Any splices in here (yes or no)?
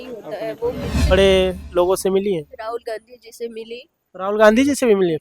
yes